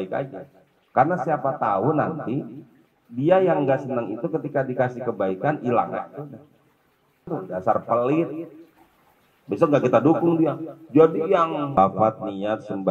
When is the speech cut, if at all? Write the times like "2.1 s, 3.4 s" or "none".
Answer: 7.3 s, 11.8 s